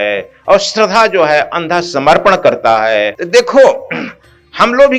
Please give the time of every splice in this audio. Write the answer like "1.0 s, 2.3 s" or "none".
3.2 s